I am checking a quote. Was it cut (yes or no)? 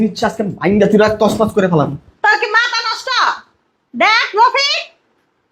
no